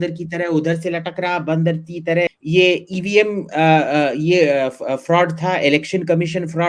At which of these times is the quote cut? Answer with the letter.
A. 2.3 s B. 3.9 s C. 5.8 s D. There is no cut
A